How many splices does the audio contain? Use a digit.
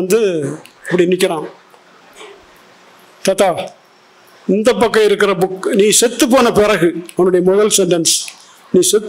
0